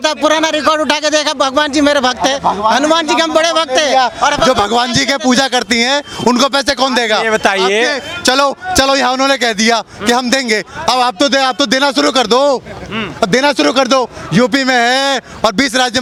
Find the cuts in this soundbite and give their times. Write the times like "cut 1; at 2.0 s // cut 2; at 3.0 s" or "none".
none